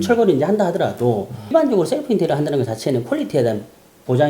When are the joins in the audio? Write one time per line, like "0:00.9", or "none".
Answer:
0:01.5